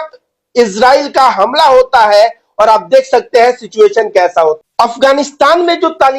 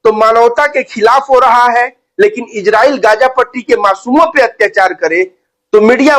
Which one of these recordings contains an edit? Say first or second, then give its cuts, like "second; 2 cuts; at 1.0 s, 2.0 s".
first; 1 cut; at 4.6 s